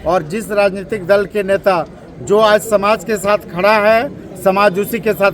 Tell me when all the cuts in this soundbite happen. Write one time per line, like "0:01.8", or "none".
none